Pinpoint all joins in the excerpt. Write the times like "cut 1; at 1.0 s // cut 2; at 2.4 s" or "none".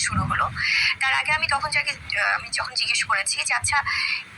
cut 1; at 1.5 s